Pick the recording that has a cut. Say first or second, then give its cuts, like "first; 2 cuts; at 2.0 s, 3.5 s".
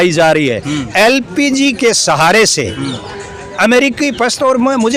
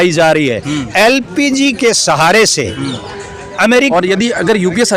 second; 1 cut; at 3.9 s